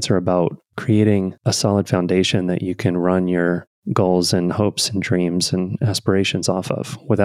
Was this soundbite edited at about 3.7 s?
yes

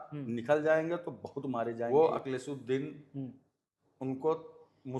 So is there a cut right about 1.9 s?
yes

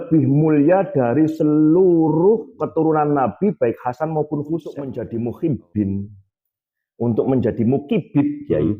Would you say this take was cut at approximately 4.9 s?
yes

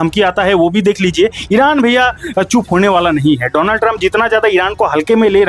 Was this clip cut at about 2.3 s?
no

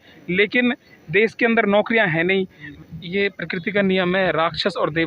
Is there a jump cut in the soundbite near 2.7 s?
yes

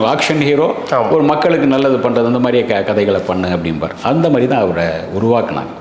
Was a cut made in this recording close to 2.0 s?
no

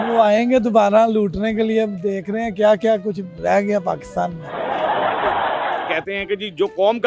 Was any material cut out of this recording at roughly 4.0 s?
no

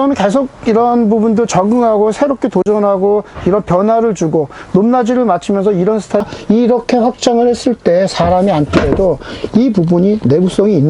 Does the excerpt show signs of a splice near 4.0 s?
no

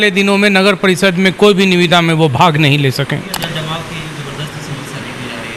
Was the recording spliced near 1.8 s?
no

